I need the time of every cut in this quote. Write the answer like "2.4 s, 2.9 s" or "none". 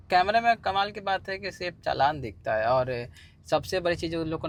none